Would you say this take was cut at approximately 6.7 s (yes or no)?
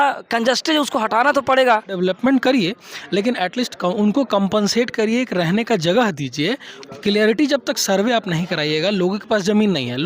yes